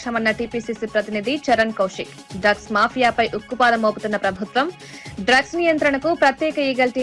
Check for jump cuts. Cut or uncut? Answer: uncut